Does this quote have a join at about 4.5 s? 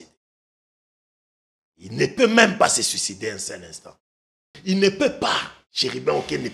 yes; 1 cut; at 4.5 s

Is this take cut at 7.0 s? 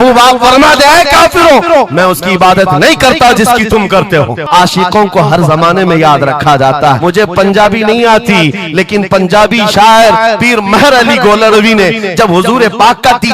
yes; 2 cuts; at 4.5 s, 7.0 s

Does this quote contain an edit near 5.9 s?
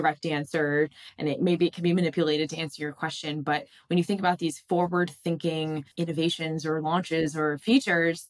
yes; 1 cut; at 5.9 s

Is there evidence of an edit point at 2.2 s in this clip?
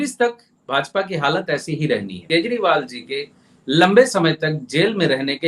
yes; 1 cut; at 2.2 s

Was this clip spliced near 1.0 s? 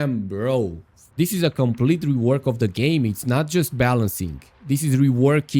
yes; 1 cut; at 1.0 s

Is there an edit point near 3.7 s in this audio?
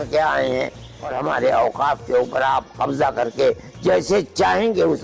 no; 1 cut; at 0.9 s

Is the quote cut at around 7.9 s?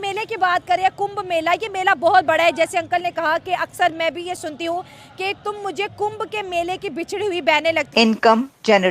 yes; 1 cut; at 7.9 s

